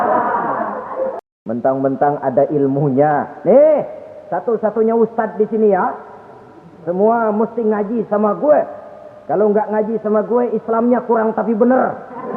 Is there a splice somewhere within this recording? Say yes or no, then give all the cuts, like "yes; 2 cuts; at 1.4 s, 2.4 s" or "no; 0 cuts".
yes; 1 cut; at 1.2 s